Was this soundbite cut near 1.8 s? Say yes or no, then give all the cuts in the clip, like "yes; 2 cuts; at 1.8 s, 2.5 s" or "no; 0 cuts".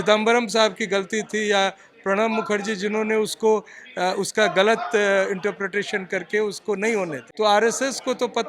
no; 1 cut; at 7.2 s